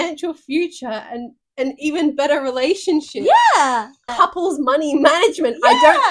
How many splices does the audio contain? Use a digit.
1